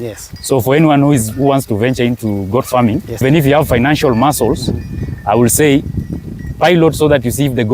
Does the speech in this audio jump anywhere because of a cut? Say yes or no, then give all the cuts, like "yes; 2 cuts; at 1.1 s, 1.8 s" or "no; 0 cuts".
yes; 1 cut; at 3.2 s